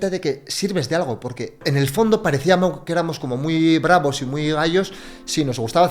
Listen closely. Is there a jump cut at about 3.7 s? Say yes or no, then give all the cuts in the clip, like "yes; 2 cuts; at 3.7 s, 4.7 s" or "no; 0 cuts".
no; 1 cut; at 1.6 s